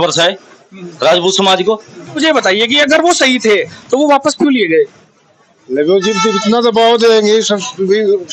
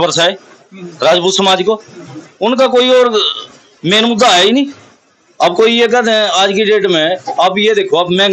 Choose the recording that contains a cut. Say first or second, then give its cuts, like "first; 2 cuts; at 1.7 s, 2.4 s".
first; 1 cut; at 2.2 s